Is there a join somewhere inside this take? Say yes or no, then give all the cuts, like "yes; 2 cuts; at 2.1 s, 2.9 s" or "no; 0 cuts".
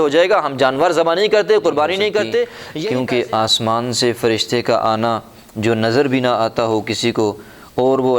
yes; 1 cut; at 2.7 s